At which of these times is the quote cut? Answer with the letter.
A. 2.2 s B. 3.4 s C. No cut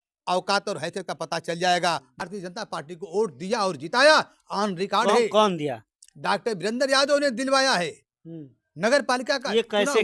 A